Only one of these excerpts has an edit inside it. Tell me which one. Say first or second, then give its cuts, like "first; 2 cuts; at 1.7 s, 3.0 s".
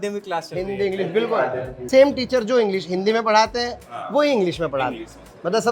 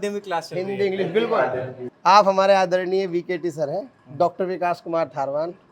first; 1 cut; at 1.7 s